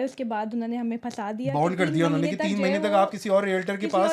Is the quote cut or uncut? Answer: uncut